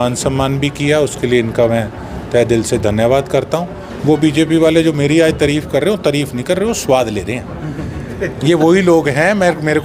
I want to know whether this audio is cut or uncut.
cut